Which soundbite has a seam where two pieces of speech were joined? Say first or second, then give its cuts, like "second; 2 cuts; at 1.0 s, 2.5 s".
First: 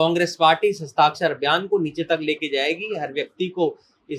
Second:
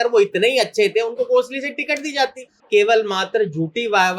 second; 1 cut; at 2.5 s